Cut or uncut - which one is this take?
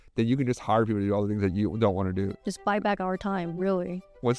cut